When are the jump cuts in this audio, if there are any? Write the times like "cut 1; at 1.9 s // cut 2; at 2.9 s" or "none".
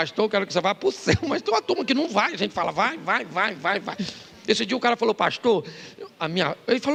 none